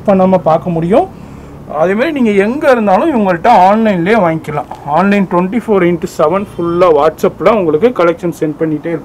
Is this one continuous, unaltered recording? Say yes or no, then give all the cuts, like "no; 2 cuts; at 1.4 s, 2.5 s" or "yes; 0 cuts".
yes; 0 cuts